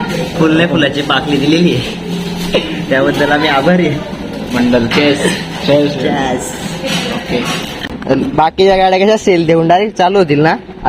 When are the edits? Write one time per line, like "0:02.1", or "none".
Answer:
0:07.7